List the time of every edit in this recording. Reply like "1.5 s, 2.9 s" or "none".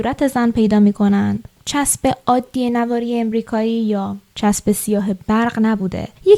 none